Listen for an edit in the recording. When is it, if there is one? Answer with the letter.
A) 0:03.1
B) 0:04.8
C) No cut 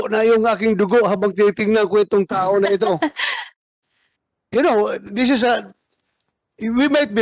C